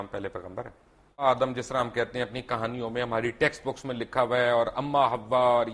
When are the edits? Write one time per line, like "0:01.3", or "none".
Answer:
0:01.2